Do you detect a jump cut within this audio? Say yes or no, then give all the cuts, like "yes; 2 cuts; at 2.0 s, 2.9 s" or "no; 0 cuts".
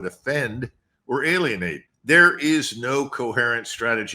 yes; 1 cut; at 1.8 s